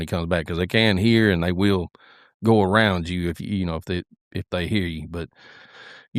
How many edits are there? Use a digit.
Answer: 0